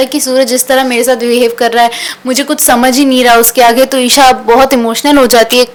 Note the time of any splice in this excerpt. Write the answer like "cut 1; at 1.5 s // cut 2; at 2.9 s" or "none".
none